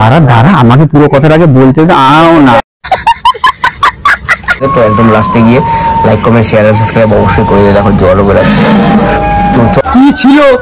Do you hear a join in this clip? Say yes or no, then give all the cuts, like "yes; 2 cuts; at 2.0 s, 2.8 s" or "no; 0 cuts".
yes; 2 cuts; at 4.6 s, 9.8 s